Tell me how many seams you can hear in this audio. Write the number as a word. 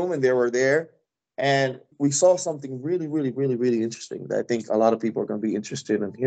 one